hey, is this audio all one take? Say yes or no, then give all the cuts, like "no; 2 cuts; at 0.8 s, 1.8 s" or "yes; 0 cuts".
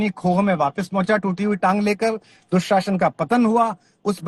yes; 0 cuts